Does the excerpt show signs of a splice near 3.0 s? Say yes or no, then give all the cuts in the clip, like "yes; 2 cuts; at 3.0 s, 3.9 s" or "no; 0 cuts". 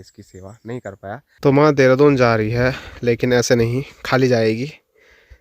no; 1 cut; at 1.3 s